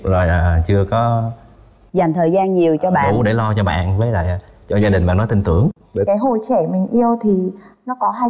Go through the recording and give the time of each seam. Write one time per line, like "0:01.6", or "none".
0:06.1

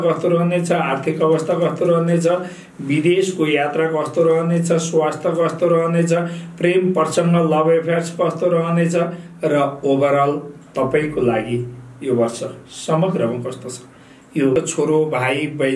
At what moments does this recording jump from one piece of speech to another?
0:14.6

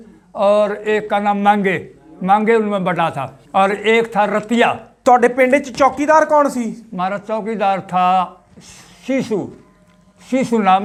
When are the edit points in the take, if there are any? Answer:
none

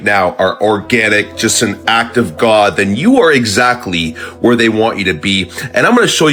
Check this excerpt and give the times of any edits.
none

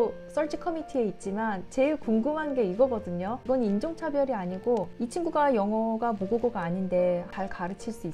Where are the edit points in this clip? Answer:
0:03.4
0:04.9
0:07.3

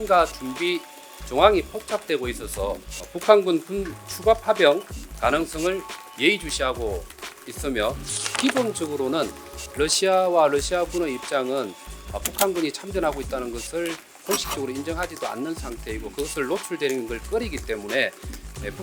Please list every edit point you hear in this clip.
0:08.3

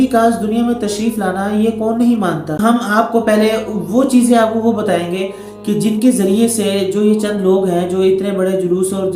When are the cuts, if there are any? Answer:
0:02.6

